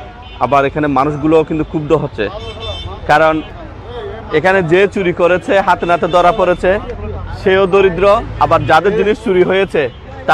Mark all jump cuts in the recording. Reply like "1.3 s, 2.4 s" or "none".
3.6 s

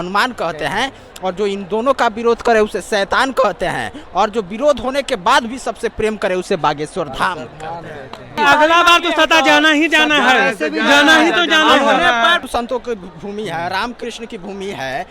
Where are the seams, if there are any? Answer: 8.4 s, 12.4 s

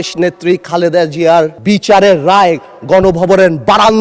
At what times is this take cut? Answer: 1.6 s

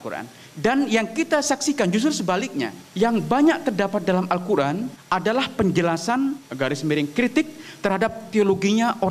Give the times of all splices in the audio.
2.8 s, 4.9 s, 6.5 s

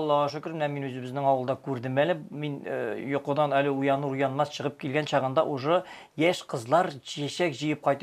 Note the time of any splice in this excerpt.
none

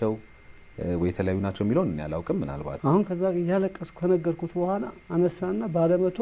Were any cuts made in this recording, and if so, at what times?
2.7 s

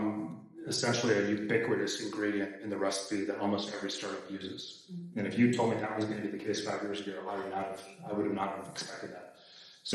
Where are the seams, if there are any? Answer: none

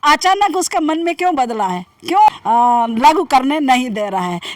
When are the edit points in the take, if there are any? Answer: 2.3 s

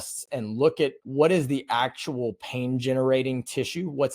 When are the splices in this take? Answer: 1.0 s

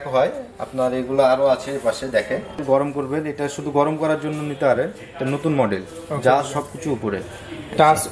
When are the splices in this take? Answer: 2.6 s

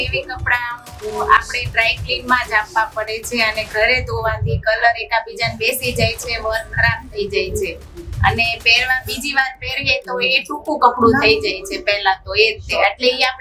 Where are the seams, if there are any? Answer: none

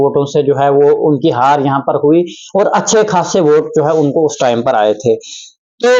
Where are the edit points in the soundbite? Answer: none

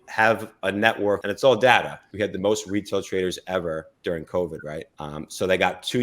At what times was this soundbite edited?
1.2 s, 2.0 s, 4.9 s

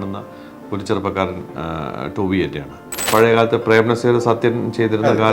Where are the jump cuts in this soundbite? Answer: 3.0 s

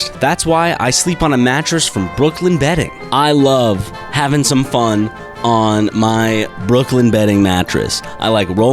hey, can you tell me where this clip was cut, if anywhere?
3.0 s

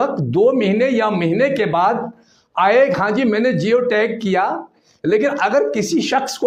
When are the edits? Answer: none

